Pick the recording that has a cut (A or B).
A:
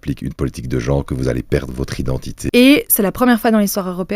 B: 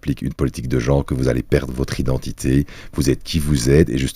A